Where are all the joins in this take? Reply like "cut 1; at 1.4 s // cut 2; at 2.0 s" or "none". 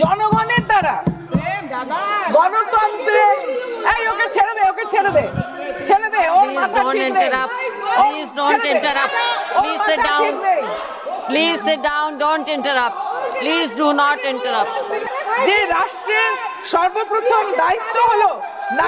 cut 1; at 15.0 s